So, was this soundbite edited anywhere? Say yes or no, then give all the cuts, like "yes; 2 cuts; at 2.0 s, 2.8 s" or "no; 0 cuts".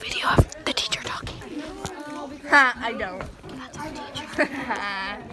yes; 1 cut; at 1.2 s